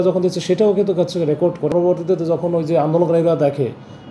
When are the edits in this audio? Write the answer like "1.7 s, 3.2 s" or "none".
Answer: 1.7 s

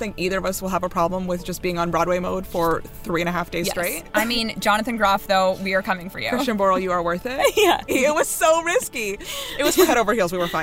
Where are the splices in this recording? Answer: 4.0 s, 7.9 s

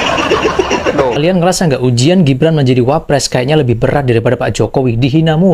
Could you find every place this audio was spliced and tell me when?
1.2 s

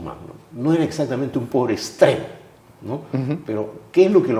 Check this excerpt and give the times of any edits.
none

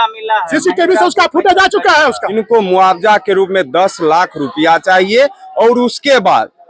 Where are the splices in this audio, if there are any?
2.2 s

